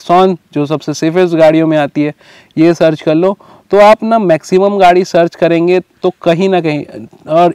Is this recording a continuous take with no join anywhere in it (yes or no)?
yes